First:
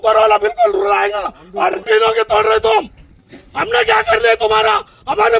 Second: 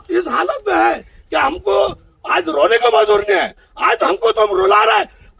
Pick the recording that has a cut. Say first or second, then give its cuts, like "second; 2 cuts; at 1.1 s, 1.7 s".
first; 1 cut; at 1.8 s